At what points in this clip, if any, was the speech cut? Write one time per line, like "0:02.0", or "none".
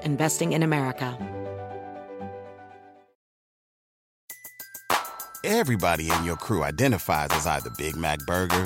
0:01.1